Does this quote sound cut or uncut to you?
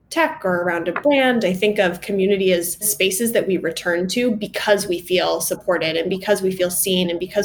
uncut